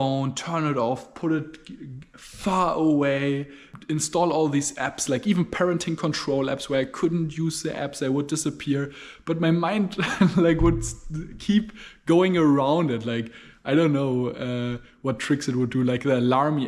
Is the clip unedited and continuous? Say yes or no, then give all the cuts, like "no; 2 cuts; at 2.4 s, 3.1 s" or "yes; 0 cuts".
yes; 0 cuts